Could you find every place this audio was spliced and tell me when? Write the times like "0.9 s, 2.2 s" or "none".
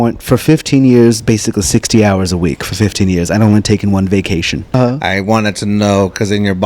4.7 s